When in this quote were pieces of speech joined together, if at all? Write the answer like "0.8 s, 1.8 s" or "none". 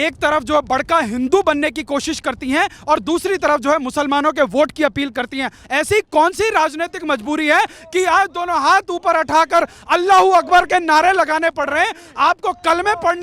5.6 s